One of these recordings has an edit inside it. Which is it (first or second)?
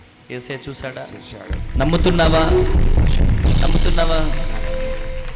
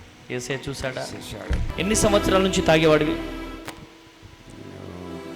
second